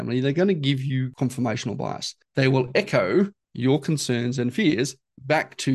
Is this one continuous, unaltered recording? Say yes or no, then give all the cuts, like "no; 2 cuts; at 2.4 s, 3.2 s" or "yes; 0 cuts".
no; 3 cuts; at 1.1 s, 2.4 s, 3.4 s